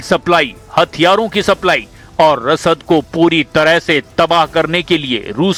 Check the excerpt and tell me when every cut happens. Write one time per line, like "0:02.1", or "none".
none